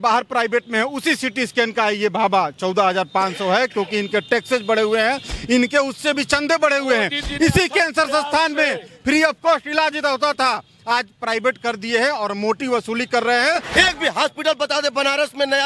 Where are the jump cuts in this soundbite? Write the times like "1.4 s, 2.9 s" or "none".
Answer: 13.7 s

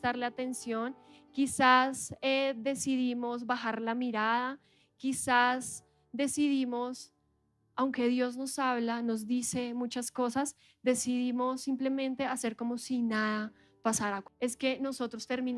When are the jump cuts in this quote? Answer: 14.2 s

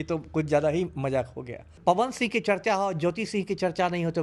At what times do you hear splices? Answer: 1.8 s

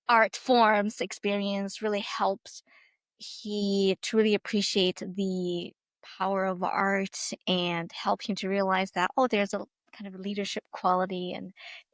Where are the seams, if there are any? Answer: none

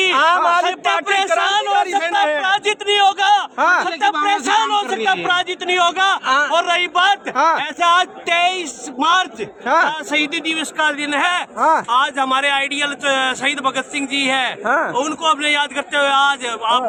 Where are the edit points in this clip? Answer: none

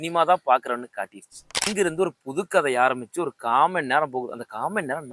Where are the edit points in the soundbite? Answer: 1.7 s

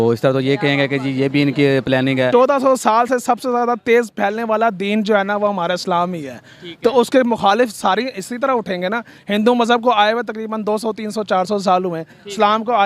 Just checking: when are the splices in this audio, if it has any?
2.3 s

